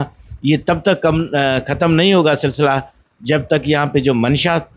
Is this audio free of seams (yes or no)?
yes